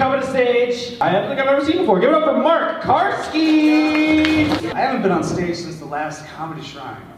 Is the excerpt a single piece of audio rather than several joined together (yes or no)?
no